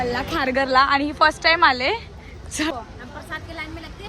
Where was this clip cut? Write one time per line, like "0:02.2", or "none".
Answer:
0:02.7